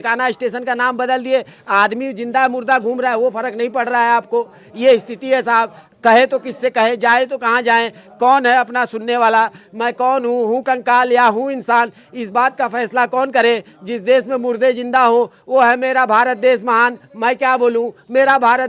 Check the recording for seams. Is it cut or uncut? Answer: uncut